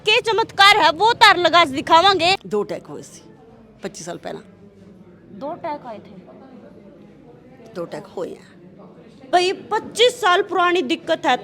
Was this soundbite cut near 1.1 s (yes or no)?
no